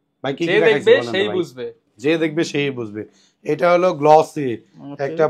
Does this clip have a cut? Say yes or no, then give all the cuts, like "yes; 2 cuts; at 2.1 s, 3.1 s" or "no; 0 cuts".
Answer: no; 0 cuts